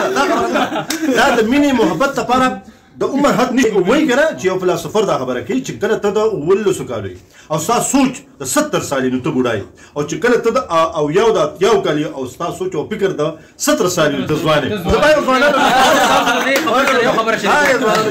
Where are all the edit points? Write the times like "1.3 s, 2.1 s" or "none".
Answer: 3.6 s